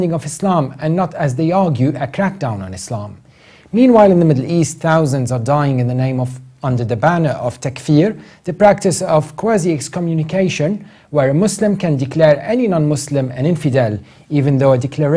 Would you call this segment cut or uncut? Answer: cut